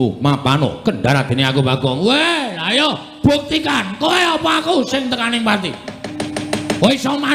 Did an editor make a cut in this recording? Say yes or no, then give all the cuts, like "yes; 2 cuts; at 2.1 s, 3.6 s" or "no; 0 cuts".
no; 0 cuts